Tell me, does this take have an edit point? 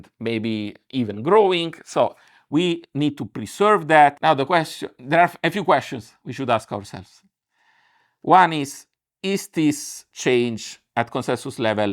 yes; 1 cut; at 4.2 s

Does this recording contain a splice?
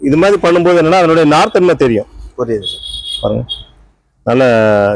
no; 0 cuts

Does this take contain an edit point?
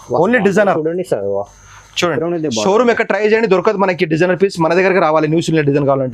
no; 0 cuts

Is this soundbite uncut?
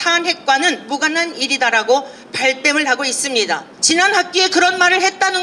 no; 1 cut; at 3.7 s

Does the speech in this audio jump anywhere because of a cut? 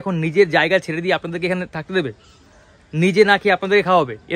no; 0 cuts

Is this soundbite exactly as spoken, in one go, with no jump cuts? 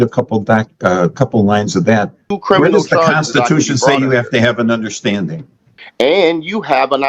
no; 2 cuts; at 2.3 s, 5.8 s

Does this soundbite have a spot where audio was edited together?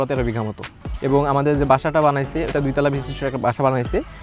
no; 0 cuts

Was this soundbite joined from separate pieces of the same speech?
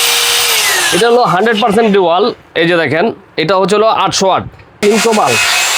yes; 1 cut; at 4.8 s

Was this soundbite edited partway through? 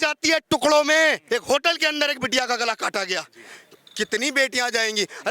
yes; 1 cut; at 1.2 s

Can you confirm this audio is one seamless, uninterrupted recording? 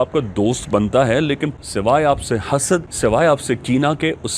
no; 2 cuts; at 1.6 s, 2.9 s

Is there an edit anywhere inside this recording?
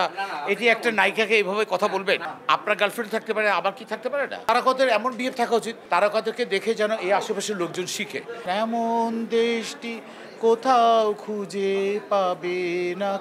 yes; 4 cuts; at 2.3 s, 4.4 s, 5.8 s, 8.4 s

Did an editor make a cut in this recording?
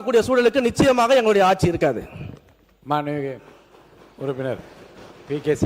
no; 0 cuts

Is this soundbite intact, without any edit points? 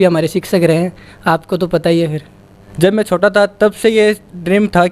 no; 1 cut; at 2.7 s

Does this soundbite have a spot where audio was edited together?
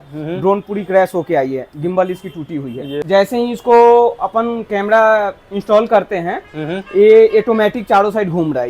yes; 1 cut; at 3.0 s

